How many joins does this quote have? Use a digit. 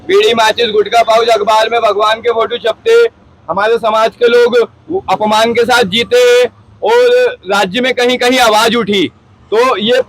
0